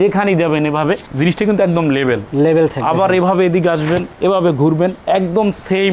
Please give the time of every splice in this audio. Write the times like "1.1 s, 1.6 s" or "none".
none